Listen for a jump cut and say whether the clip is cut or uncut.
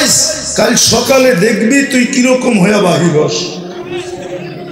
cut